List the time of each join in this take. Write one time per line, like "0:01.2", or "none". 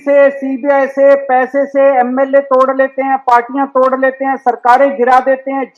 none